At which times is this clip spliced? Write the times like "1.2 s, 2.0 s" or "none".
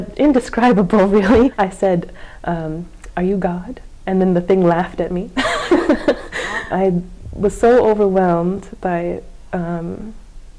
1.5 s, 6.5 s